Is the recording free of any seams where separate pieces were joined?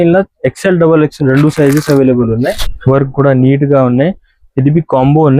no; 1 cut; at 2.6 s

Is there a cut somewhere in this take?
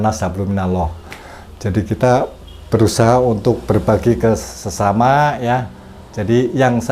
no; 0 cuts

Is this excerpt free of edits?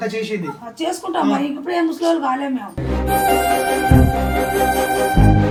yes; 0 cuts

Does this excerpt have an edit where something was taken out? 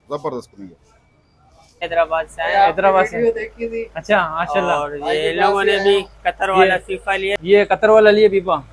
yes; 2 cuts; at 1.8 s, 7.4 s

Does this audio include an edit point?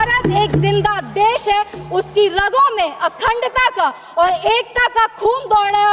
no; 0 cuts

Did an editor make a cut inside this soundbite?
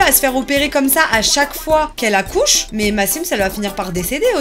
no; 0 cuts

